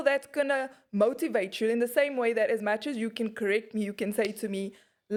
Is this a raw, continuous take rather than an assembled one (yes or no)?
yes